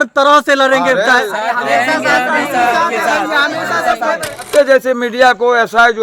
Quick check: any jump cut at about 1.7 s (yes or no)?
no